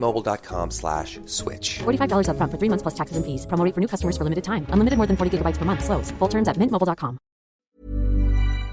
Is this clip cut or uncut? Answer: cut